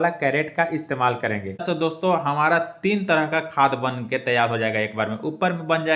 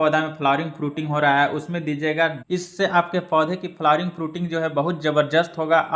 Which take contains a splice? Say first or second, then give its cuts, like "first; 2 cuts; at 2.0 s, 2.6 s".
first; 1 cut; at 1.6 s